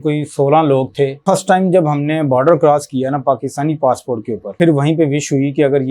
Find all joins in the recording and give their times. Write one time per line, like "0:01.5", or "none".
0:01.2
0:04.5